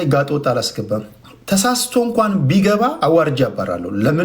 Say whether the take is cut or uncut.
cut